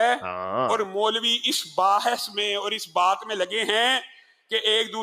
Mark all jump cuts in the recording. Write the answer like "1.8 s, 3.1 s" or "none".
3.8 s